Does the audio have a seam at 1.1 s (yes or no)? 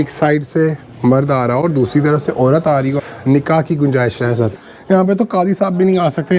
no